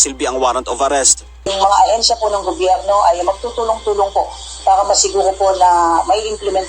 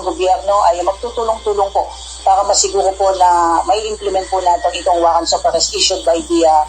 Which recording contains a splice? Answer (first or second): first